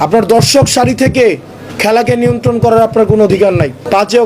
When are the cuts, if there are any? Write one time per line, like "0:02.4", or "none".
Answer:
0:03.4